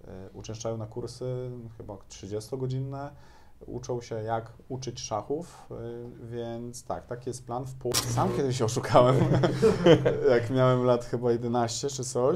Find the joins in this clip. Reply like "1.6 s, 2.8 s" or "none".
7.9 s